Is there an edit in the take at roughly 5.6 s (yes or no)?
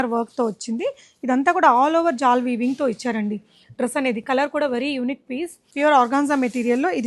yes